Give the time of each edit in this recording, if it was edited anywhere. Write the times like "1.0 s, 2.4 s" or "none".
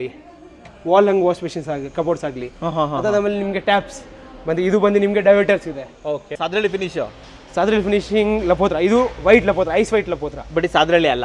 6.3 s

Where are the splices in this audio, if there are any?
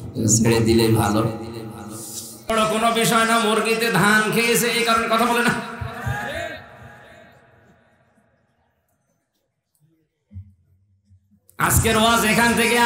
2.4 s

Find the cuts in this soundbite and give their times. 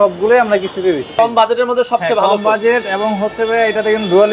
1.1 s

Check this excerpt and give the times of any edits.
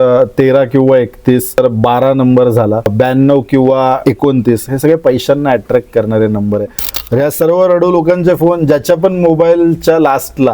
1.6 s, 2.9 s, 4.0 s, 6.8 s

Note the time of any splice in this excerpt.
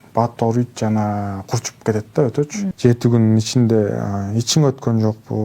2.6 s

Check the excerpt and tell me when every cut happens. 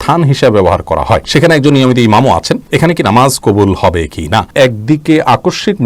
1.2 s, 2.6 s, 4.5 s

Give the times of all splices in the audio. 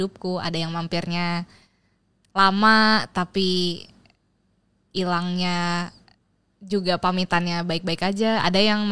none

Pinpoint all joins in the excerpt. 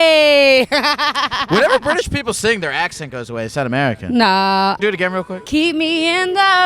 4.8 s

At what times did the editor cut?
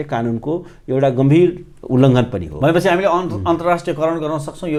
none

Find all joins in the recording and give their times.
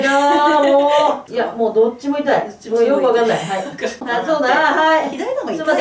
1.2 s, 4.0 s

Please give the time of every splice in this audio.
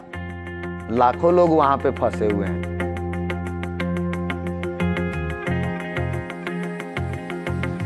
none

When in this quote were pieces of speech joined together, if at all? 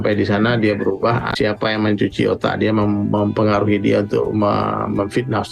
1.3 s

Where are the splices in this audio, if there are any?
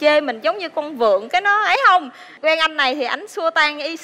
2.2 s

